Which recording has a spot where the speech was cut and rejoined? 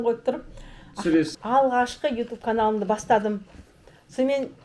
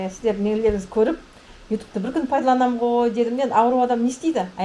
first; 1 cut; at 1.3 s

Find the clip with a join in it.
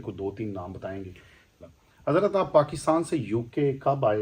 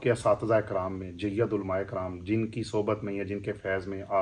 first; 1 cut; at 1.7 s

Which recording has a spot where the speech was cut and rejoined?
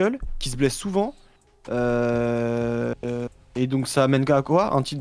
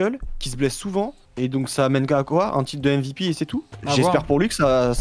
second; 2 cuts; at 1.2 s, 3.7 s

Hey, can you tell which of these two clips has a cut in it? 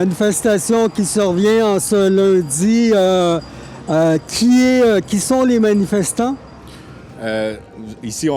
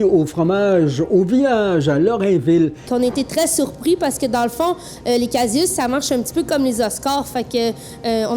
second; 1 cut; at 2.9 s

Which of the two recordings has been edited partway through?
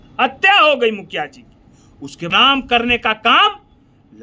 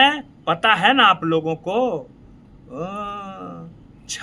first; 1 cut; at 2.3 s

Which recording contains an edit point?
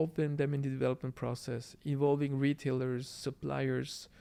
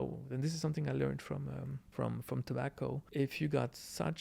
second; 2 cuts; at 1.8 s, 3.0 s

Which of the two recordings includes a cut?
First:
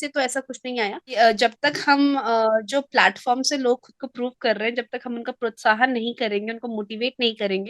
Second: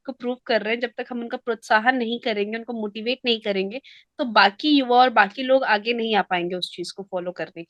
first; 1 cut; at 1.1 s

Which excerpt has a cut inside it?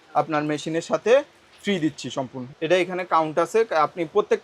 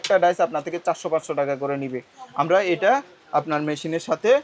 first; 1 cut; at 2.5 s

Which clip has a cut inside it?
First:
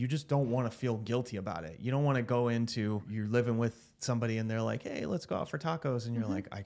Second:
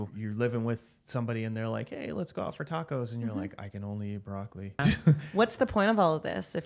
second; 1 cut; at 4.8 s

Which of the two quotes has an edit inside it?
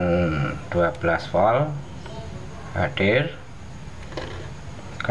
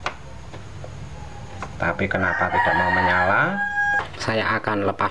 second; 1 cut; at 4.0 s

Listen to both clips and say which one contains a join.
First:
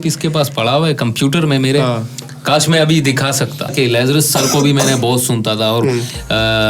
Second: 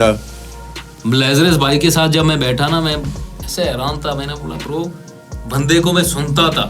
first; 1 cut; at 3.7 s

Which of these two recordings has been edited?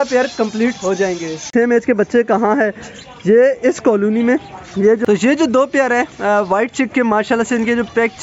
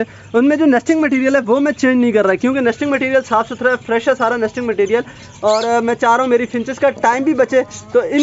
first; 2 cuts; at 1.5 s, 5.0 s

